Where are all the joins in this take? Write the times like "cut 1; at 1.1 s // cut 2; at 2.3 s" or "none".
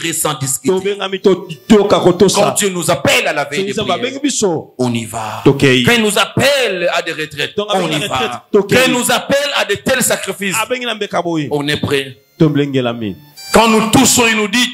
none